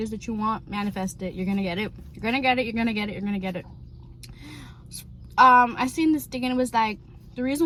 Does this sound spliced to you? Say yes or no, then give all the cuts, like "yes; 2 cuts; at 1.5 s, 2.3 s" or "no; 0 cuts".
no; 0 cuts